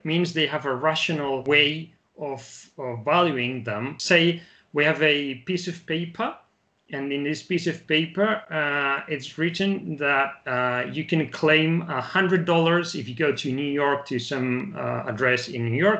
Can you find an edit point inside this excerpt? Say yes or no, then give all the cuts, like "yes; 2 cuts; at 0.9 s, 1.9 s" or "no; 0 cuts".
yes; 2 cuts; at 1.4 s, 4.0 s